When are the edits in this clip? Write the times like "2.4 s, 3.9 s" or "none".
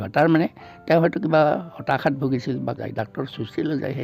2.8 s